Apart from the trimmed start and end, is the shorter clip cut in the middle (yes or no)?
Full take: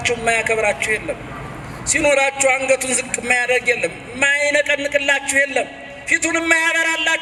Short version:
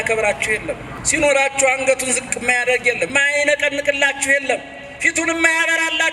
yes